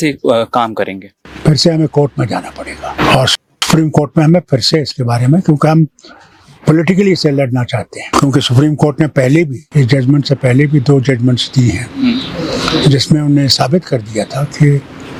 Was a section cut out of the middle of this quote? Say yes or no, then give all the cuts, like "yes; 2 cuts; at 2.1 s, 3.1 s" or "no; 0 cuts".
no; 0 cuts